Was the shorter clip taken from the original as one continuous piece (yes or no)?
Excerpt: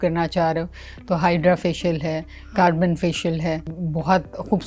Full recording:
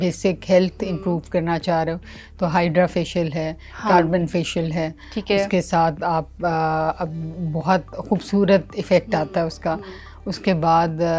no